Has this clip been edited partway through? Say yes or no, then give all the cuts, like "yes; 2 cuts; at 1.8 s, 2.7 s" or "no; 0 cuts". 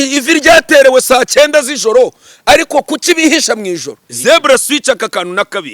yes; 1 cut; at 4.0 s